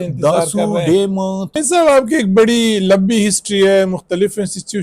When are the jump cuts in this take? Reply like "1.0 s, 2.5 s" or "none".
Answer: 1.5 s